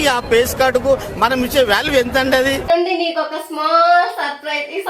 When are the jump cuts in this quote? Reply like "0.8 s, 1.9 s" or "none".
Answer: 2.7 s